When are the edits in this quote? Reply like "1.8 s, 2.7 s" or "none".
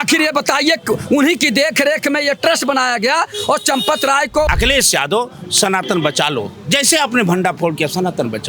4.5 s